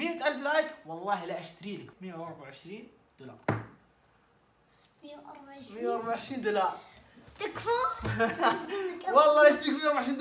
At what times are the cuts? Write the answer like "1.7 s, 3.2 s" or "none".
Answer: 1.9 s